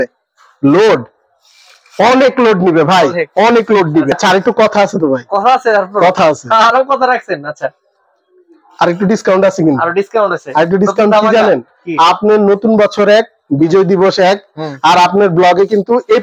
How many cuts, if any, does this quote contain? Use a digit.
1